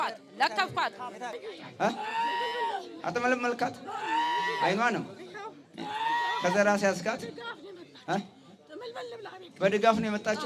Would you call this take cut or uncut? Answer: cut